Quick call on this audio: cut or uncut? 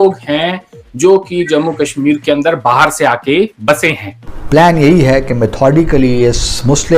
cut